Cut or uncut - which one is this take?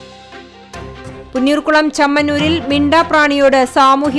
cut